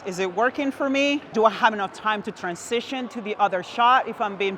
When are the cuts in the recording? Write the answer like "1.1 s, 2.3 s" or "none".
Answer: 1.3 s